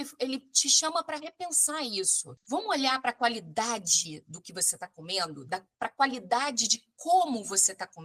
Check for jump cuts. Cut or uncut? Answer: uncut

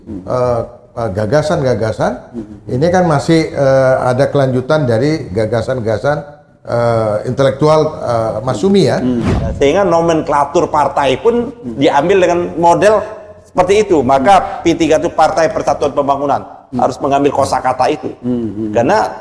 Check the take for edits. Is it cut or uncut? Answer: cut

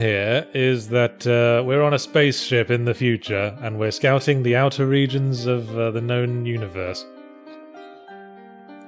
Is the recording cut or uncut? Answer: cut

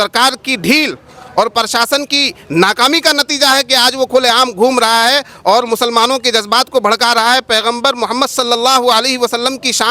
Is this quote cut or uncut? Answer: uncut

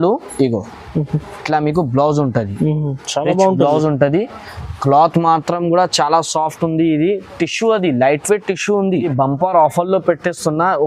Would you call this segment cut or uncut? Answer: cut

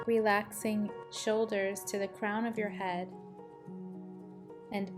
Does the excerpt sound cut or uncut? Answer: cut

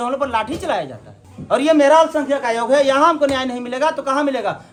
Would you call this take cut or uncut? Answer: uncut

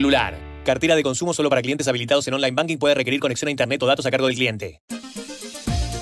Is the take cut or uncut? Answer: uncut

